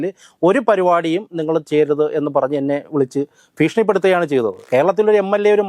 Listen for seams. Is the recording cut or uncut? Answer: cut